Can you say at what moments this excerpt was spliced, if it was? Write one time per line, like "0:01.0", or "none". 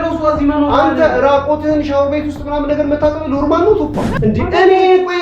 0:04.1